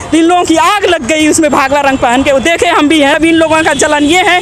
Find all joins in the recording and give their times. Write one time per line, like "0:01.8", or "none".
0:03.2